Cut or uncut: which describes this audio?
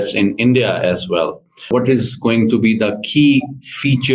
cut